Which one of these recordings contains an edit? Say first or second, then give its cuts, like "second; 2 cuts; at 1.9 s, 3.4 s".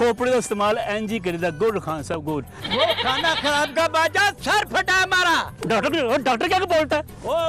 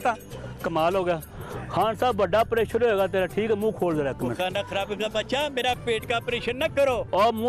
first; 1 cut; at 2.6 s